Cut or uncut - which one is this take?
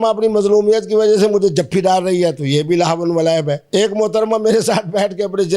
cut